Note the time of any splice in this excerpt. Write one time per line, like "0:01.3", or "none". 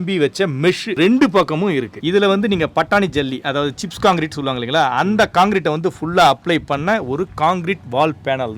0:02.0

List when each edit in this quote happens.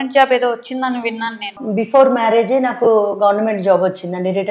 0:01.6

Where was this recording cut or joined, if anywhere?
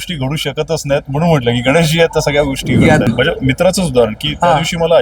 0:03.1

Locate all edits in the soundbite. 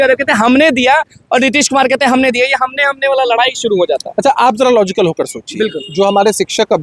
none

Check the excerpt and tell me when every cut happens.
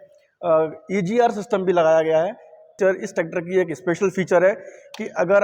0:02.7

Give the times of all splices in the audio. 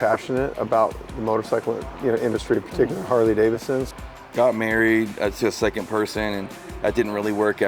0:03.9

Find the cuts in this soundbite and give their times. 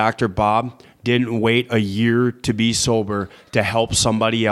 none

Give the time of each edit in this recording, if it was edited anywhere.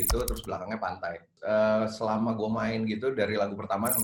0:01.3

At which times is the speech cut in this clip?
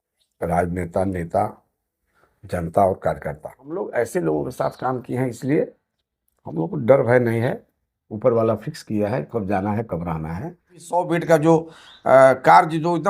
0:03.9
0:10.9

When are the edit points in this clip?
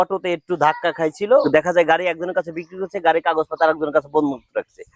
0:01.5

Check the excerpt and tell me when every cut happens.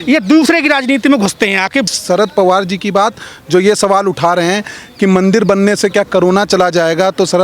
0:01.9

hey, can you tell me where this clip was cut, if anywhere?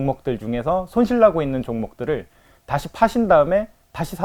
none

